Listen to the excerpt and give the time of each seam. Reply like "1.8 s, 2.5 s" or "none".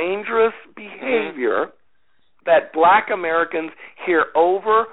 none